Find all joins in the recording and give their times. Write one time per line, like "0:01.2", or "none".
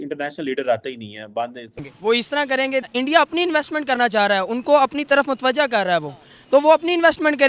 0:01.8